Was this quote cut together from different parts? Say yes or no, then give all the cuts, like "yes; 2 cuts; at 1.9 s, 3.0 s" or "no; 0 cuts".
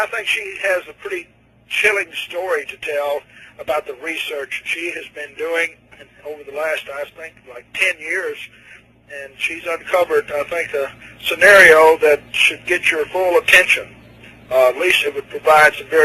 no; 0 cuts